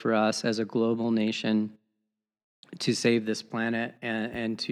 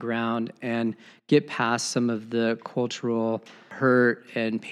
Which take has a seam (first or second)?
second